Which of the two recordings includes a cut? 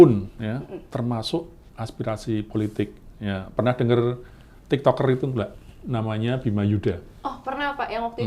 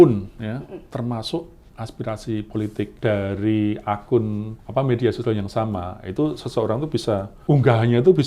second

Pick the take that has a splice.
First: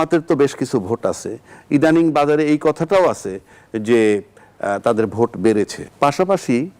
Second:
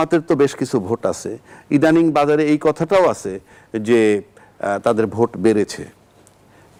first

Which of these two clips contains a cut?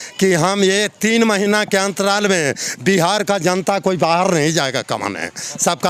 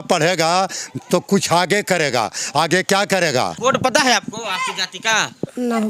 second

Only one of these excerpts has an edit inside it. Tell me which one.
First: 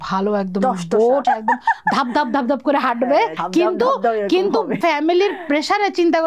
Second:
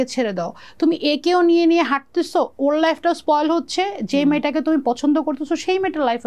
first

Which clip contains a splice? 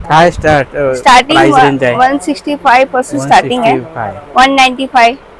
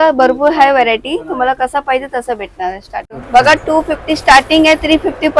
second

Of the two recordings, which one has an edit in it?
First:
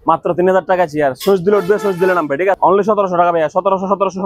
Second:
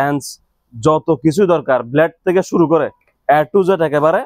first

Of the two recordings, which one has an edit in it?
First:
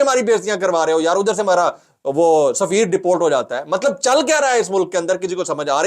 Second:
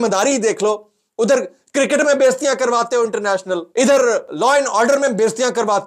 second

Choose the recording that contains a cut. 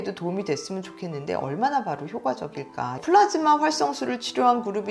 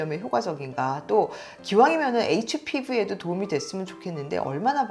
first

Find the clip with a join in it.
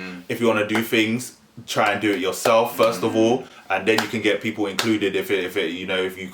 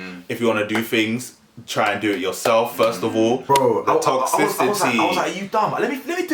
second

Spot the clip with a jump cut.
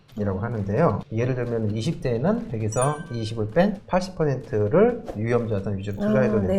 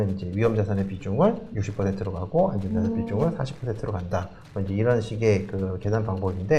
first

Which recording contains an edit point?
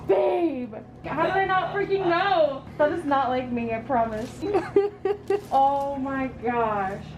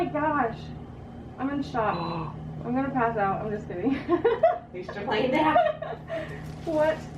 first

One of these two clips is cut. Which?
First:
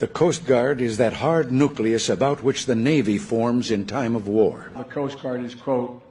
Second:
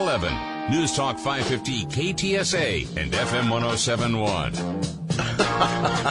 first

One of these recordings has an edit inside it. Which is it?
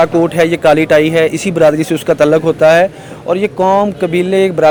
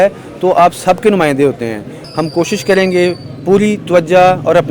second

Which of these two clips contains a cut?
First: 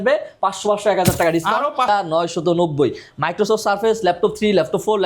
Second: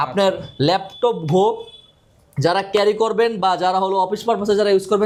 first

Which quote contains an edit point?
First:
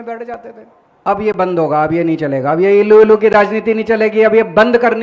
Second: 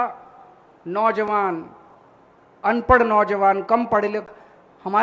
first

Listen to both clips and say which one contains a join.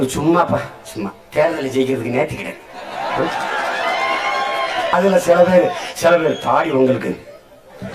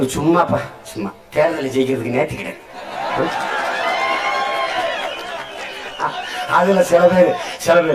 first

